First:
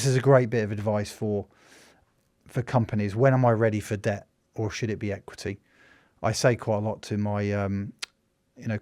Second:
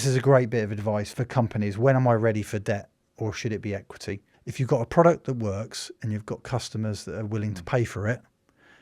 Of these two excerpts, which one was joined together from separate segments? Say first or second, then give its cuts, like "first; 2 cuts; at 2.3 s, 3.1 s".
second; 2 cuts; at 1.1 s, 4.4 s